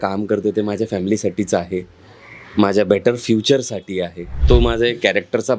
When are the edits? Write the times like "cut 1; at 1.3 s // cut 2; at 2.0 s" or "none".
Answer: cut 1; at 4.4 s